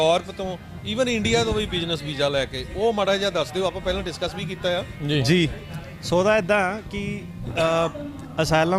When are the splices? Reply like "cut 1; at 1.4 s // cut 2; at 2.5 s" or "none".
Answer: none